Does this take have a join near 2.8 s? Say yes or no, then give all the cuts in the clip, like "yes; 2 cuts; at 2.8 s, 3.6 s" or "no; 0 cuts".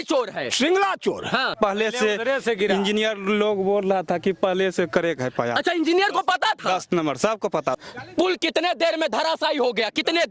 no; 2 cuts; at 1.6 s, 7.7 s